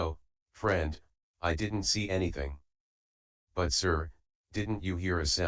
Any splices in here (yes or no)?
no